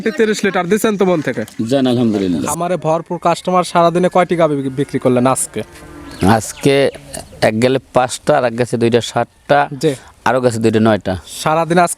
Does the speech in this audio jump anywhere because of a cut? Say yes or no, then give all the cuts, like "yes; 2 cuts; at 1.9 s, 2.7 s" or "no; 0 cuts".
yes; 1 cut; at 2.5 s